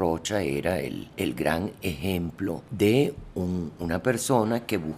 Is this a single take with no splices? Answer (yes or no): no